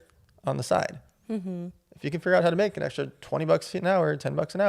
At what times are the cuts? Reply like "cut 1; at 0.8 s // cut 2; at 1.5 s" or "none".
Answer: none